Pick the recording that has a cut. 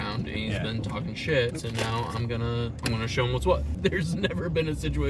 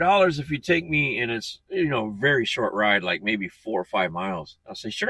first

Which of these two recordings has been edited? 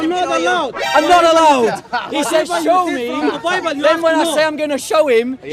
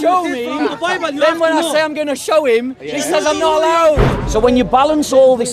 second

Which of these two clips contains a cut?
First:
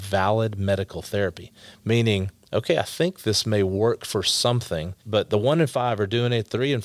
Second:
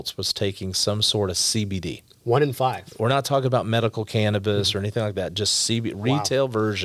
first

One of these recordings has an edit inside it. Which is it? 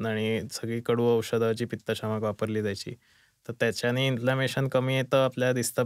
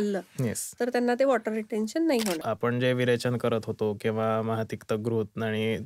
second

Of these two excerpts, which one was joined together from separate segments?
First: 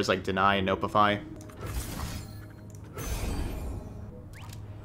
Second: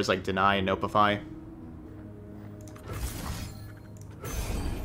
first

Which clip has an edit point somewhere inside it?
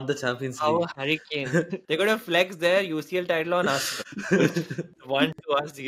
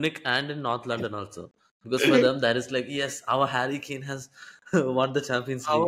first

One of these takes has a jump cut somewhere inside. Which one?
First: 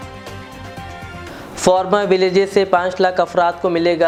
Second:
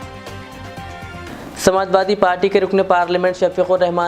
second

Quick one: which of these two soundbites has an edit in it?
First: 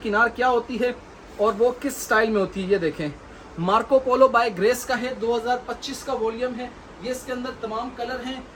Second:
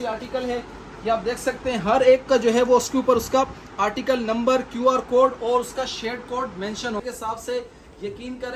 second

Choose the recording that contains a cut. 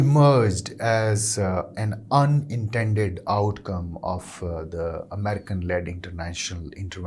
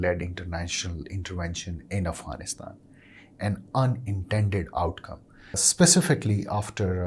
second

